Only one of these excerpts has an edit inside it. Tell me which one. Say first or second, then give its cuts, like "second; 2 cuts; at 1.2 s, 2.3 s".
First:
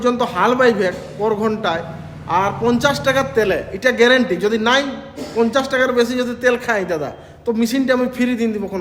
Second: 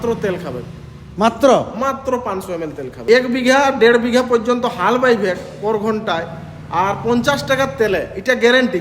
second; 1 cut; at 2.9 s